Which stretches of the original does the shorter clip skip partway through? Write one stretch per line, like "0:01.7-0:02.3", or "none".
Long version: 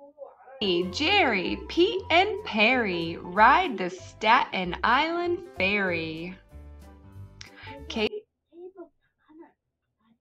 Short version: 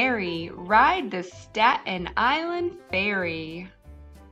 none